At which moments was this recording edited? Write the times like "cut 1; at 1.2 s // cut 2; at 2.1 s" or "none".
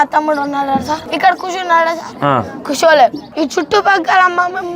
cut 1; at 1.1 s // cut 2; at 2.2 s // cut 3; at 3.2 s